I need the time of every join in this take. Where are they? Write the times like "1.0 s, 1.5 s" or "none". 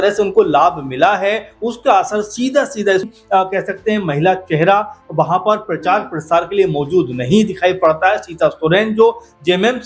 3.1 s